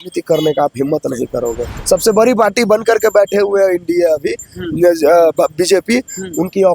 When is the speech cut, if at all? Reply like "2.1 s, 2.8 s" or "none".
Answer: 1.7 s